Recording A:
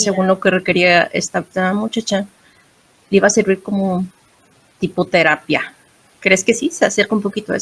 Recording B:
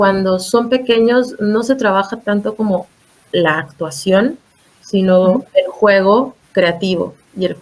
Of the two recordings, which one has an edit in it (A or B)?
A